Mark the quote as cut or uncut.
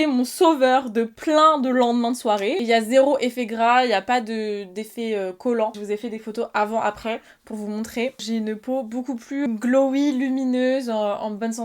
cut